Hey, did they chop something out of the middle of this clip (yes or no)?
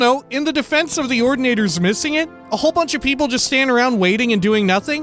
yes